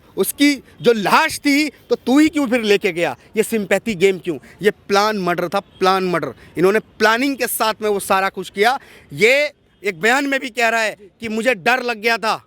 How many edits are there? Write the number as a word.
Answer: zero